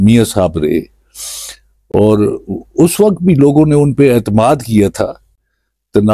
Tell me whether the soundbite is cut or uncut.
uncut